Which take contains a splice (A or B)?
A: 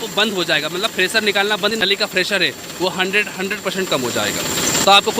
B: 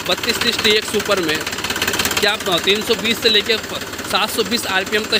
A